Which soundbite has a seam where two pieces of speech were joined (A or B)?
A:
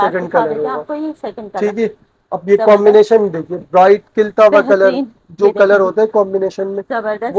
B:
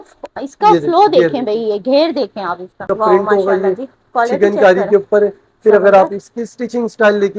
B